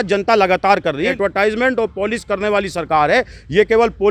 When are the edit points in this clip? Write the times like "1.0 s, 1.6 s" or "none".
1.1 s